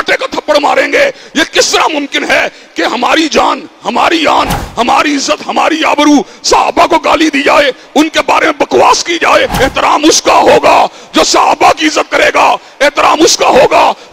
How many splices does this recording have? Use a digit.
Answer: 1